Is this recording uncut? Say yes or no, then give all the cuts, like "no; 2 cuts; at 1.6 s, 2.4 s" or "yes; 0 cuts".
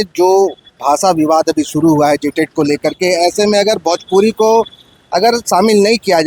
yes; 0 cuts